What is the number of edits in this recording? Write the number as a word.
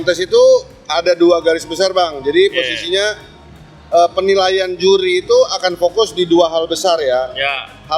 zero